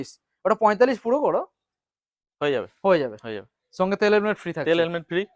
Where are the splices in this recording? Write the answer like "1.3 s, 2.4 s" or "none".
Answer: none